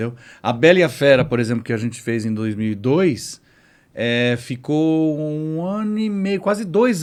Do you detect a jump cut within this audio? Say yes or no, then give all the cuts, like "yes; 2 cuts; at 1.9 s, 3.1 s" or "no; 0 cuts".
no; 0 cuts